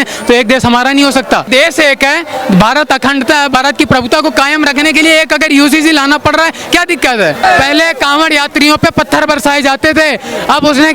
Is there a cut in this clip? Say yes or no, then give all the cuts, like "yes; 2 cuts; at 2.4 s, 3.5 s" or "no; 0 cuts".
yes; 2 cuts; at 1.5 s, 7.4 s